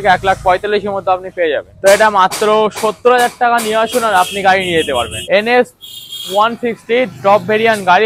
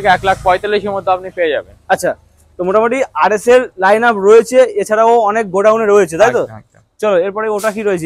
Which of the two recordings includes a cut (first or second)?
first